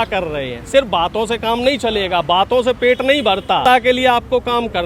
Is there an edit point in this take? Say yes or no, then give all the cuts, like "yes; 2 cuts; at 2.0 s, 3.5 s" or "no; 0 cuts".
yes; 1 cut; at 3.6 s